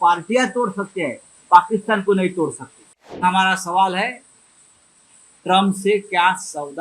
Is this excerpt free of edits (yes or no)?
no